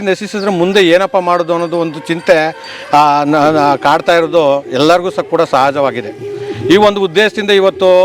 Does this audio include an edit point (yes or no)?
no